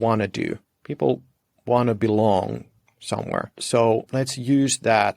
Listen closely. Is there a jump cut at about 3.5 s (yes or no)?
yes